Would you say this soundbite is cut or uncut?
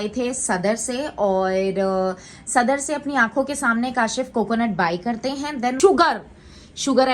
cut